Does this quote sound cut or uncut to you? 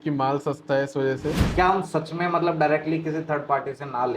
cut